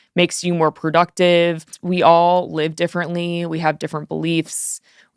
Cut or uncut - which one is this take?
cut